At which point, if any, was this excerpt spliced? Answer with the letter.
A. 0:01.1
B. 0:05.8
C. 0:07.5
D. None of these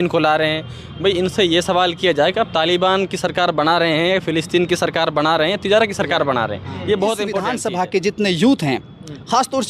C